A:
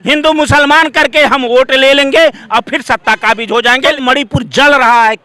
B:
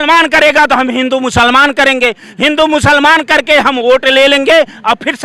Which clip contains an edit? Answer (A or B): A